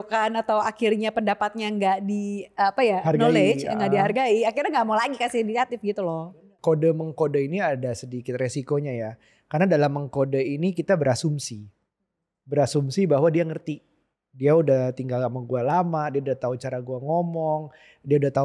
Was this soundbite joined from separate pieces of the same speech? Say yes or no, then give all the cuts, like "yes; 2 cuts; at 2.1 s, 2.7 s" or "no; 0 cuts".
yes; 1 cut; at 6.3 s